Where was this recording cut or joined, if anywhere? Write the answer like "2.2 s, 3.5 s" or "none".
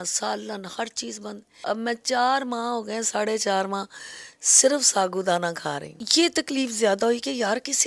5.9 s